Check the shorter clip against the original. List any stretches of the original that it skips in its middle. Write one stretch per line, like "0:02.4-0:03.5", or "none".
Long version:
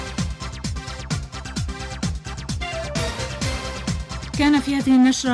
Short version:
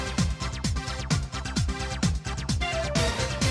none